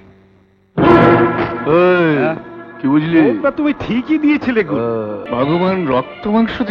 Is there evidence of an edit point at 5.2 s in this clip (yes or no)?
yes